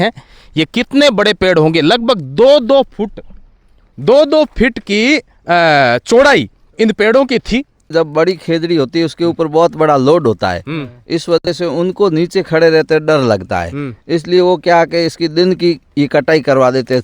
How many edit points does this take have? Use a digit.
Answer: 1